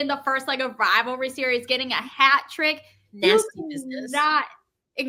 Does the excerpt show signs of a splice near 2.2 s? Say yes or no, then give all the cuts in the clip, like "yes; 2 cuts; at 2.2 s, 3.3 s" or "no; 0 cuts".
no; 0 cuts